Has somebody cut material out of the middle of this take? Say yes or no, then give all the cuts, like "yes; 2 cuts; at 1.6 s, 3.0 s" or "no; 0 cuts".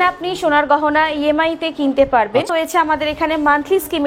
yes; 1 cut; at 2.5 s